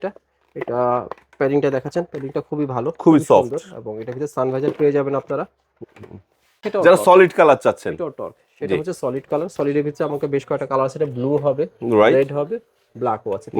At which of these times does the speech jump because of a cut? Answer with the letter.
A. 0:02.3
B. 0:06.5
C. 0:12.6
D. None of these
B